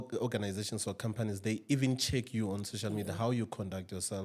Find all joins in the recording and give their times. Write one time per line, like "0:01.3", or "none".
none